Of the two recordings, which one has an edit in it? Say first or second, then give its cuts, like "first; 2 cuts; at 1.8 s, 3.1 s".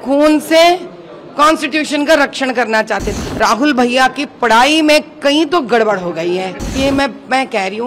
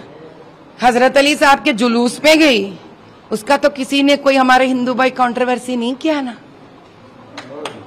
first; 2 cuts; at 3.1 s, 6.6 s